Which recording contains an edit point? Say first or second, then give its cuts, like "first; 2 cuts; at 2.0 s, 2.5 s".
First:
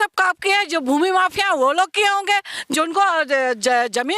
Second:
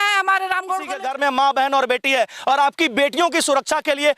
second; 1 cut; at 1.0 s